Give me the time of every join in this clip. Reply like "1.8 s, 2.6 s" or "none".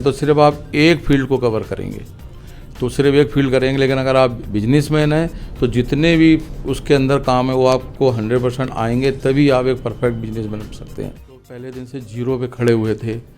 11.4 s